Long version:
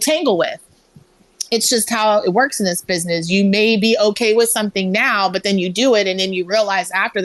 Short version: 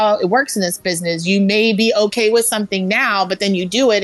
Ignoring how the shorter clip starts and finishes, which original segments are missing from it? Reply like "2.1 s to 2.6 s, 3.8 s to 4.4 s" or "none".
none